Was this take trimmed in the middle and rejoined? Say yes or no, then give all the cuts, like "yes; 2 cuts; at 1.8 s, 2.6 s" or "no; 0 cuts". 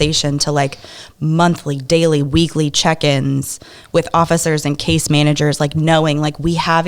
no; 0 cuts